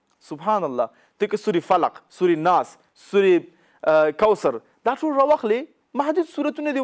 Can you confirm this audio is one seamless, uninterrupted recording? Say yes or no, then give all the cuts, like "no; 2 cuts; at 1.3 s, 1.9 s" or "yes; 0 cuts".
yes; 0 cuts